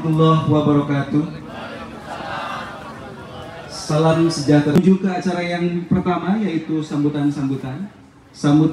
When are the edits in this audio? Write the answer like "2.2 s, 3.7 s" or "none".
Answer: none